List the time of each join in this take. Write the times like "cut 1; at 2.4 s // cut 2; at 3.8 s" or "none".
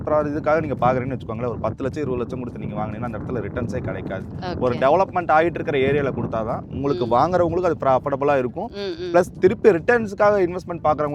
none